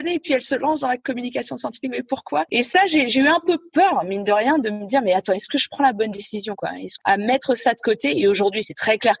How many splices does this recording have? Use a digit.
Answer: 2